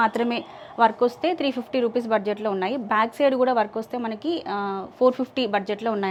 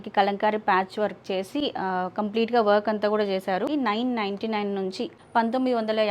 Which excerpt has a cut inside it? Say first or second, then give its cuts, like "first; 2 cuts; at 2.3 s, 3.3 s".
second; 2 cuts; at 3.7 s, 5.1 s